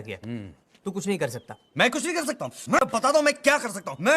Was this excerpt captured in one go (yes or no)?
no